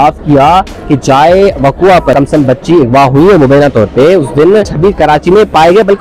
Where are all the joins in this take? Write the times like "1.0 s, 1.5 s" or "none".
2.1 s, 4.7 s